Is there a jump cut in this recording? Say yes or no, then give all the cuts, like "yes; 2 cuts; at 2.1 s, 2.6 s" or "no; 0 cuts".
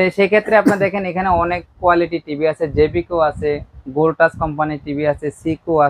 no; 0 cuts